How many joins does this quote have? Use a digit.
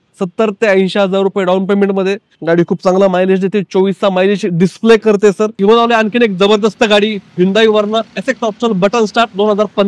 2